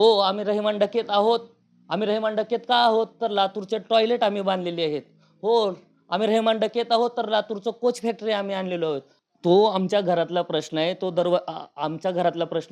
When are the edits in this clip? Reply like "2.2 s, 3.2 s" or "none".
9.1 s